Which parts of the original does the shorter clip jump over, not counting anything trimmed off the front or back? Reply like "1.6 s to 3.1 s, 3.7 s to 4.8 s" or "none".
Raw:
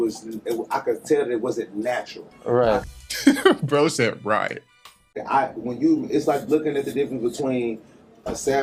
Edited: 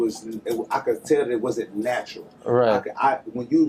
2.8 s to 5.1 s